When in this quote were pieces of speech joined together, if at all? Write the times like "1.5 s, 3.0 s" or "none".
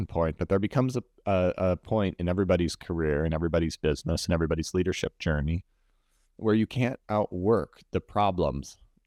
none